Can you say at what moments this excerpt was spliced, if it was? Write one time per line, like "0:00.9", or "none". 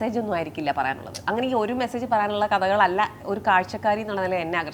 none